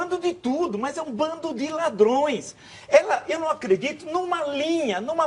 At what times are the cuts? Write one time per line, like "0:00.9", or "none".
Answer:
none